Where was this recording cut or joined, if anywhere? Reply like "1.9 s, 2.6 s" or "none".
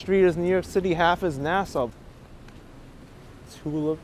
1.9 s

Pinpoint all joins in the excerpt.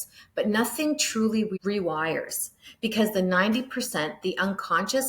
1.6 s

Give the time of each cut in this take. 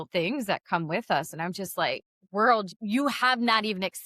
2.7 s

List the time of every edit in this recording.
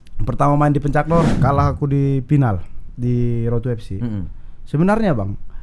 1.3 s

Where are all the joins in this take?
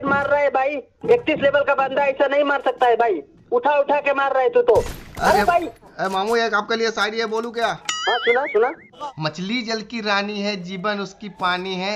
6.0 s, 9.1 s

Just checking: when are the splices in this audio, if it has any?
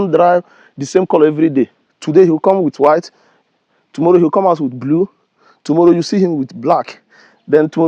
none

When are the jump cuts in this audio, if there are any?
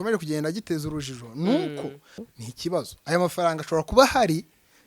2.2 s

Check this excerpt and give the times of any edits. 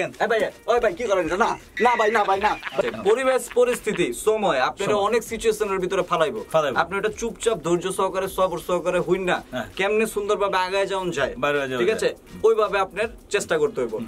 2.8 s

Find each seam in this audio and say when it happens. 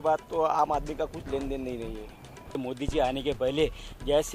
2.6 s

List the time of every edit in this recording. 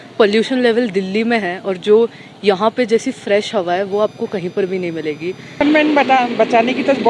5.6 s

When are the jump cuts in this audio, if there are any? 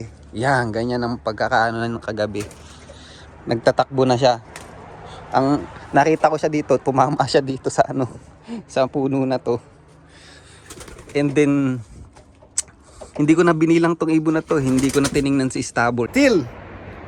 16.1 s

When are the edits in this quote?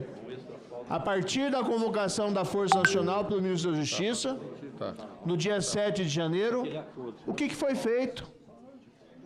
none

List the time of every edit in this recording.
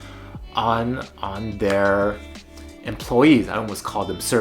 none

